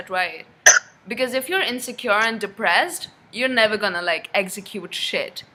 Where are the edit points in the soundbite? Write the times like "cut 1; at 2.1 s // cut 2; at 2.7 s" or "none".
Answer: none